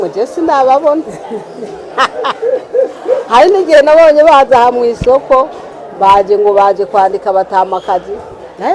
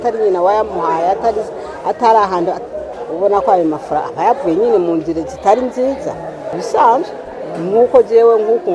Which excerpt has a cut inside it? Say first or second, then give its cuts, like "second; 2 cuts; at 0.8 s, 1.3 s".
second; 1 cut; at 6.6 s